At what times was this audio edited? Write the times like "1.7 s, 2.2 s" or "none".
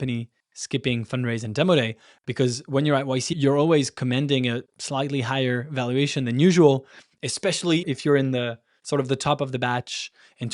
3.3 s, 7.8 s